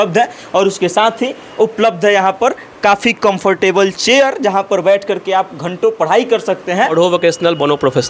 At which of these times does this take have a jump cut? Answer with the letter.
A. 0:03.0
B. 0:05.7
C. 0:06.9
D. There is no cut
C